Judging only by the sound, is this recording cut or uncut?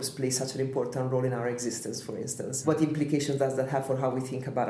cut